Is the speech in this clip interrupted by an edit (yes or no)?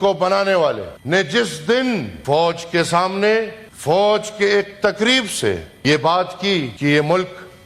yes